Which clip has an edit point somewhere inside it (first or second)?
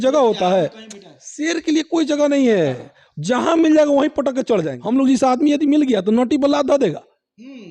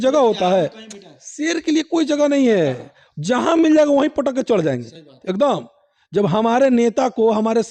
first